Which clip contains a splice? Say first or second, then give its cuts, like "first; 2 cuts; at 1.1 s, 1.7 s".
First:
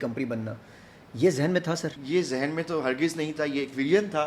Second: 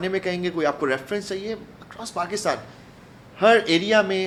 first; 1 cut; at 1.9 s